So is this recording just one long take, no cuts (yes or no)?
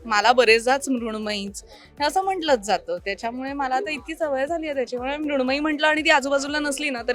yes